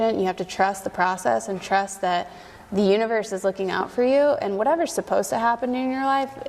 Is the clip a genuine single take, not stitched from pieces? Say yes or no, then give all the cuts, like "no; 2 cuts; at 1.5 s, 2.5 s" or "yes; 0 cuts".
yes; 0 cuts